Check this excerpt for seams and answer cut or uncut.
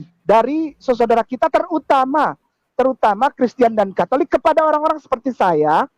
uncut